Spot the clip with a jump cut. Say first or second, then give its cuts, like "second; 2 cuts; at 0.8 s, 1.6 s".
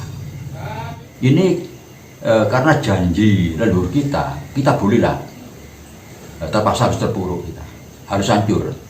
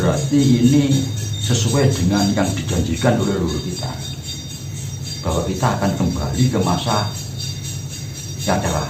first; 1 cut; at 1.0 s